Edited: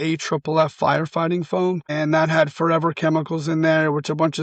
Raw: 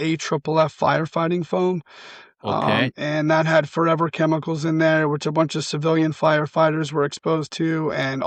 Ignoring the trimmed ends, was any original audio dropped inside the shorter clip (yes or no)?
yes